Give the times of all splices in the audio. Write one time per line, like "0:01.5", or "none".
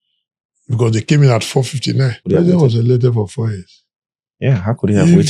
0:02.2